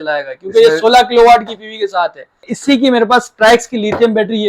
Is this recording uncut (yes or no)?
no